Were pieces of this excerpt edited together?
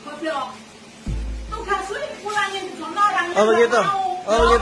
no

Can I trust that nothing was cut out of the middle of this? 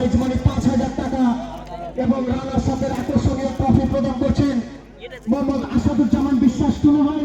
yes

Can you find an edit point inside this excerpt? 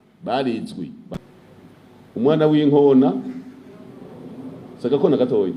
yes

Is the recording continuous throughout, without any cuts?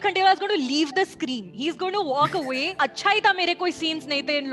no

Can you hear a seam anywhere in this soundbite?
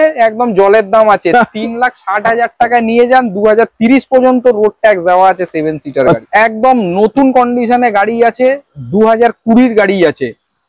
yes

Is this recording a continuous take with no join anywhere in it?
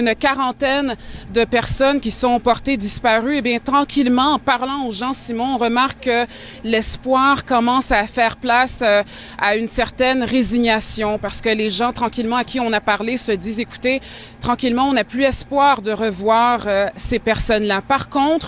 yes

